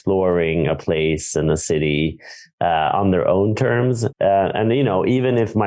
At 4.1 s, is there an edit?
yes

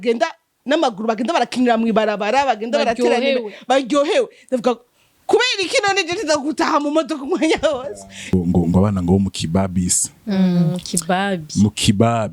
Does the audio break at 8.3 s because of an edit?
yes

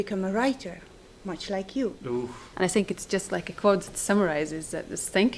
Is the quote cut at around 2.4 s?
yes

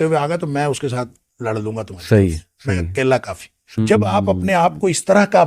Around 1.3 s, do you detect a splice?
no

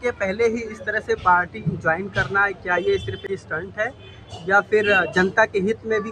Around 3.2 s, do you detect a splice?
yes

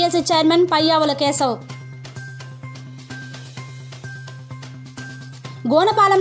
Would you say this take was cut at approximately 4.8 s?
no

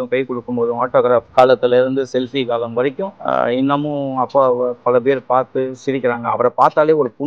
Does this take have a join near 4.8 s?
no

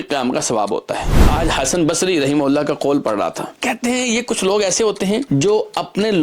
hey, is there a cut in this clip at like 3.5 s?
yes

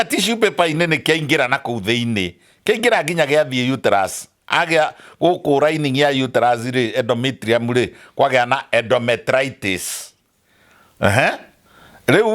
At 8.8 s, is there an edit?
no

